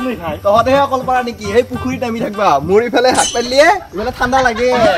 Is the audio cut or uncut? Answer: uncut